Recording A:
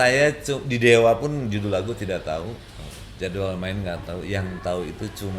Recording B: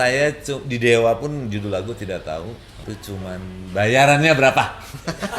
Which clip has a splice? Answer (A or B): B